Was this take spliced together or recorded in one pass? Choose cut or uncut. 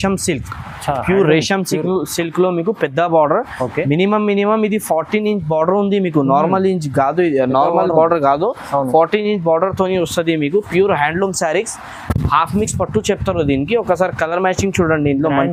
uncut